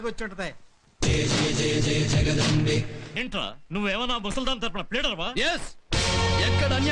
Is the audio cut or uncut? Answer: cut